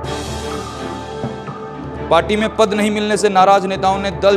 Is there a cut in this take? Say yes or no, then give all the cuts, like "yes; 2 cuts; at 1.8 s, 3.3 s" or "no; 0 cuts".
yes; 1 cut; at 1.4 s